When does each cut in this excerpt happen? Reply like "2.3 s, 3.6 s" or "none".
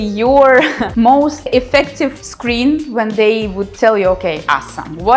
1.2 s

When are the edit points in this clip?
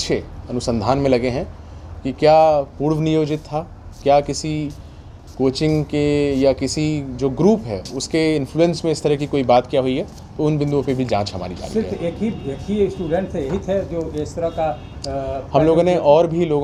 none

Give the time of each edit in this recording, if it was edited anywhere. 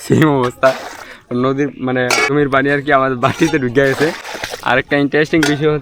2.3 s

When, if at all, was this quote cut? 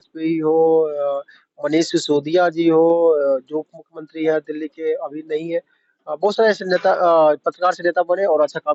none

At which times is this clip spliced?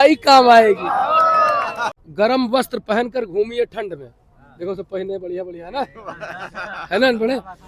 1.8 s

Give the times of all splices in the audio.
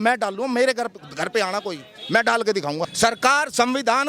2.9 s

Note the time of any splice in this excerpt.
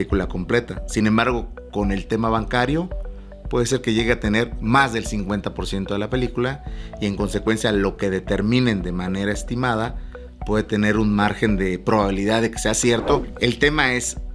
13.3 s

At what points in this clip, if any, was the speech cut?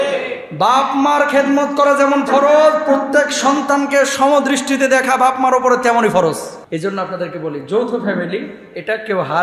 6.8 s

